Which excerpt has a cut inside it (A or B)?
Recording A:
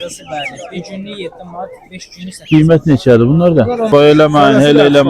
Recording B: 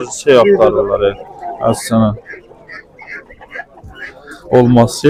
A